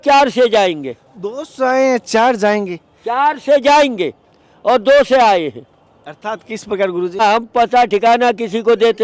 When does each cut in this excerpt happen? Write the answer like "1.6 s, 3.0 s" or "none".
7.2 s